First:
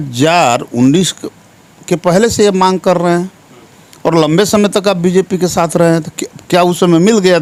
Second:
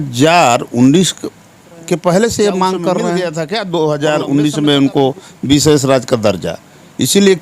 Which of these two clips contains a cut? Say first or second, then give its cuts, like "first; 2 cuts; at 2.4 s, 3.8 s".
second; 1 cut; at 3.2 s